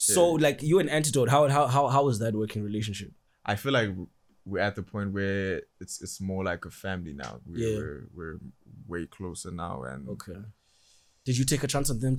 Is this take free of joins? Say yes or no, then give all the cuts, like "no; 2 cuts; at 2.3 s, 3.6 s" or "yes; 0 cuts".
yes; 0 cuts